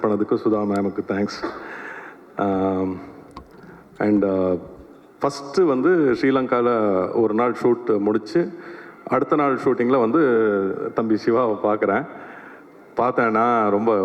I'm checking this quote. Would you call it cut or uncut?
uncut